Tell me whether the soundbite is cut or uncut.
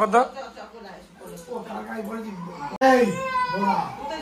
cut